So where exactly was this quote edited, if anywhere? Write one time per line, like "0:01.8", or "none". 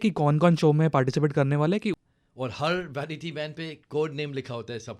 0:01.9